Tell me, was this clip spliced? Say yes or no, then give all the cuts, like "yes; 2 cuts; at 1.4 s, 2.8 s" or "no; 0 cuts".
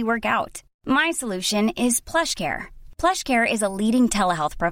no; 0 cuts